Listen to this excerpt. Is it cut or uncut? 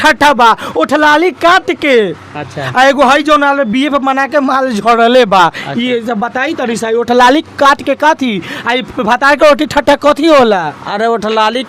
uncut